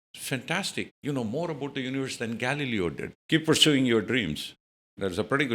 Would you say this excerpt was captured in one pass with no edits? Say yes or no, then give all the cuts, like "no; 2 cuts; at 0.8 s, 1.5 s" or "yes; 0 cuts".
no; 1 cut; at 3.1 s